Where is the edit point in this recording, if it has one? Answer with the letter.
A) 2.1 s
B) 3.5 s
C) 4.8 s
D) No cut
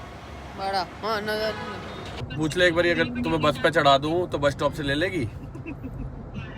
A